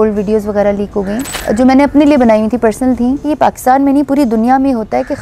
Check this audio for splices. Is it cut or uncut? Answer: cut